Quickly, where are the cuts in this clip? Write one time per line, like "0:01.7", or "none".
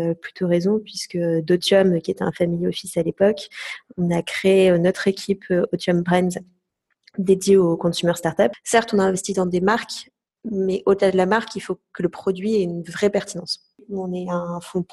0:08.6
0:13.8